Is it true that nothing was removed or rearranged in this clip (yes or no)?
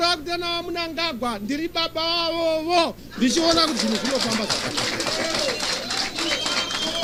yes